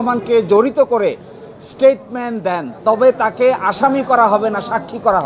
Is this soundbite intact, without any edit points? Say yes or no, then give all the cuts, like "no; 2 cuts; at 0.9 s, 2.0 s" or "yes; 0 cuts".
yes; 0 cuts